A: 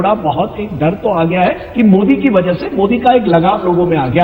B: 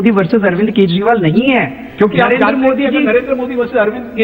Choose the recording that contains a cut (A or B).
B